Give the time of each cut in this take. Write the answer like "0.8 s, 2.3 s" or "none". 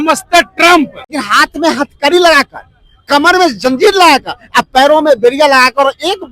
1.2 s